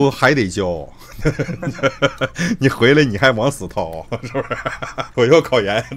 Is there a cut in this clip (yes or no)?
yes